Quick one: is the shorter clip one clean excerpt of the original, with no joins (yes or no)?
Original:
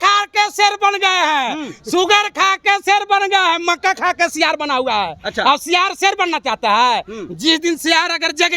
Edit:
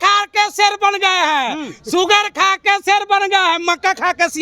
yes